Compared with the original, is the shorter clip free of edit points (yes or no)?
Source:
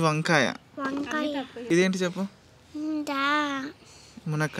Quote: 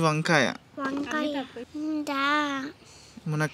no